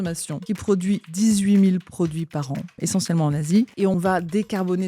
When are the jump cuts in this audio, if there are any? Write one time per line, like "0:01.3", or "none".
0:00.9
0:02.8
0:03.8